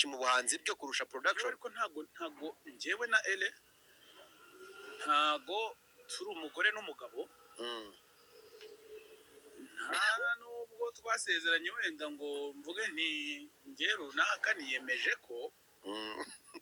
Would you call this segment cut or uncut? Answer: uncut